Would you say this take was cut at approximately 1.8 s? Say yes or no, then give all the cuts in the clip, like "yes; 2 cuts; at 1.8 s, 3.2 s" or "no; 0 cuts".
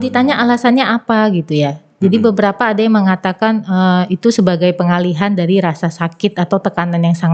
no; 0 cuts